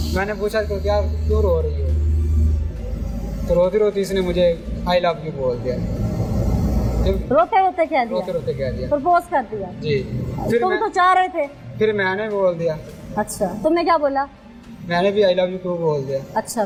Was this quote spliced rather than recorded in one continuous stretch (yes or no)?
no